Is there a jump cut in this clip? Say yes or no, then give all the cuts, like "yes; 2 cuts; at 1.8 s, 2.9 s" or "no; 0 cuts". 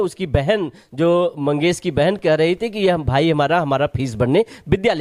no; 0 cuts